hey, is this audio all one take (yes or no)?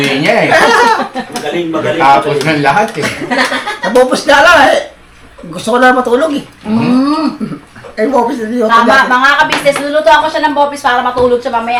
yes